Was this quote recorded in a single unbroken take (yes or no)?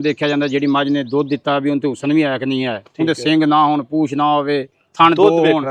yes